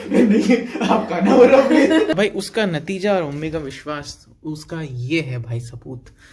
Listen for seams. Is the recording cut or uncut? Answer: cut